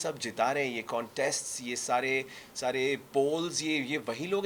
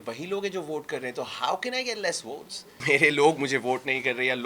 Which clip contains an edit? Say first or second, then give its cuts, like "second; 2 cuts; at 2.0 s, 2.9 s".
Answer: second; 1 cut; at 2.7 s